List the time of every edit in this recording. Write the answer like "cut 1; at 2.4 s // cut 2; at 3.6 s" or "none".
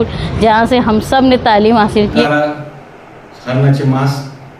cut 1; at 2.2 s